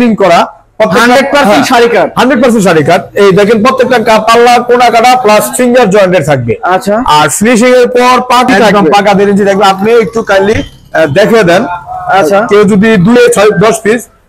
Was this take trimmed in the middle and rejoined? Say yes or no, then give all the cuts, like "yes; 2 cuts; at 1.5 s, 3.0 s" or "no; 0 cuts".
yes; 2 cuts; at 8.5 s, 13.2 s